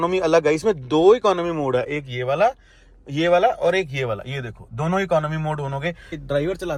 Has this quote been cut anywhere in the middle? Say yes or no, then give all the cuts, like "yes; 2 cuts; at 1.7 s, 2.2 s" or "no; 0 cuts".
no; 0 cuts